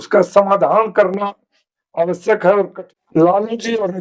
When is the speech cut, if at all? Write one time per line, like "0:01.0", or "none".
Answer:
0:02.7